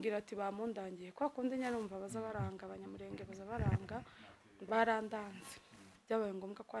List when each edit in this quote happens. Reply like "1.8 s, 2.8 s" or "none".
5.9 s